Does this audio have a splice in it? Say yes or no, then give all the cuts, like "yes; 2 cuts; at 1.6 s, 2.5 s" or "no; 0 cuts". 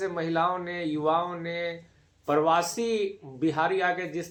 no; 0 cuts